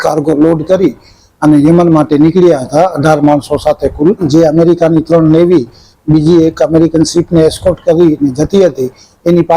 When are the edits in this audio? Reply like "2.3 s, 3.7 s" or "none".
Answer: 4.2 s